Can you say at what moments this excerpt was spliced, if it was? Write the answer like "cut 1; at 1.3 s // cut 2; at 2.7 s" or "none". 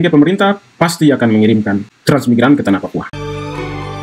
cut 1; at 3.1 s